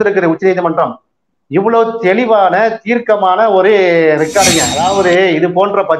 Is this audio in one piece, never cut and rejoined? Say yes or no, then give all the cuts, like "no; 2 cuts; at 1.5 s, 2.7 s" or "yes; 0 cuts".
no; 1 cut; at 4.7 s